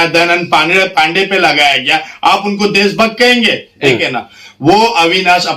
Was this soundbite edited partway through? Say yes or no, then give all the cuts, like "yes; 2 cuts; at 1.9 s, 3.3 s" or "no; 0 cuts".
yes; 1 cut; at 3.7 s